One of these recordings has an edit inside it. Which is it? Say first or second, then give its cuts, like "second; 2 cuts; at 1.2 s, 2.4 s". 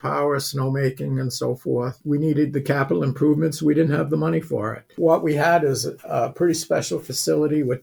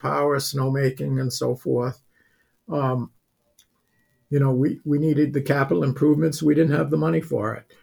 first; 2 cuts; at 2.0 s, 4.9 s